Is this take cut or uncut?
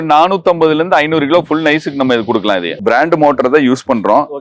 cut